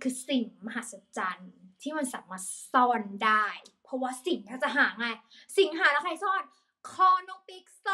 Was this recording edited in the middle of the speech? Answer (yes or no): no